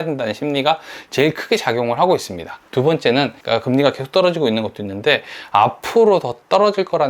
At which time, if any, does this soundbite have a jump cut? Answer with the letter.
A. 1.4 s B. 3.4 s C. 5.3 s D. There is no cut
B